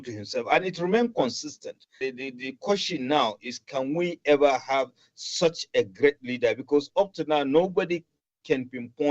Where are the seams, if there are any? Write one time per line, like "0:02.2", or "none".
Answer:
0:02.0